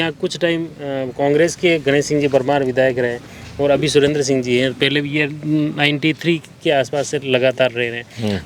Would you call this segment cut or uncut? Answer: uncut